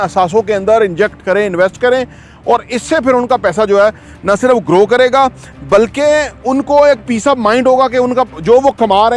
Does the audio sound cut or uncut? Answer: uncut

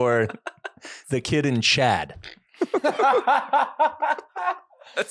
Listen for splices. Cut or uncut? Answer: uncut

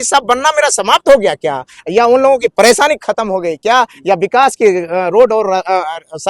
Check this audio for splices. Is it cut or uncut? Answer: uncut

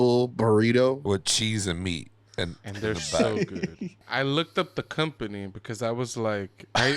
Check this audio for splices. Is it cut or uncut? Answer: cut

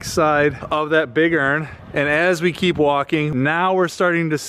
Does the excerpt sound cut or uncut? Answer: cut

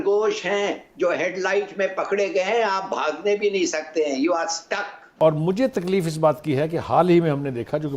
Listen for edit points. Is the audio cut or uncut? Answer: cut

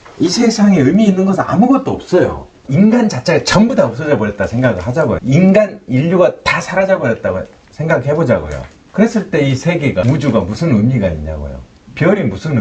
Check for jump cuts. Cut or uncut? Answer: cut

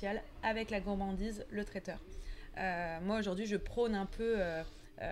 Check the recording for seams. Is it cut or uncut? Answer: uncut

